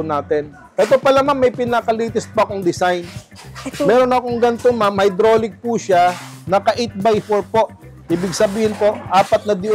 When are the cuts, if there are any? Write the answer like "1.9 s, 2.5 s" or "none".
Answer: none